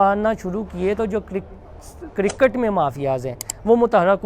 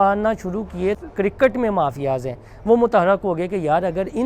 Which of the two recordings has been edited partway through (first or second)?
second